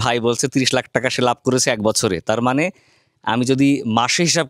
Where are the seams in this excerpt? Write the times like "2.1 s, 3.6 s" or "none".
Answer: none